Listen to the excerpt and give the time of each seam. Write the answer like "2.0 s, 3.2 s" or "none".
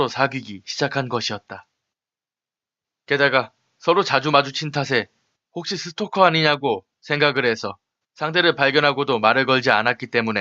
9.1 s